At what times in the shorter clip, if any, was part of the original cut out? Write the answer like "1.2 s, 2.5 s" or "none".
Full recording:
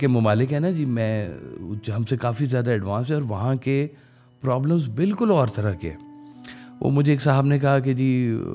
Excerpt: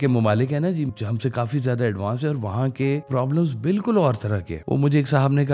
0.9 s, 3.0 s, 4.5 s